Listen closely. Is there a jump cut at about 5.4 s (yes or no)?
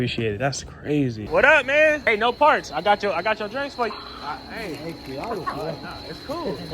no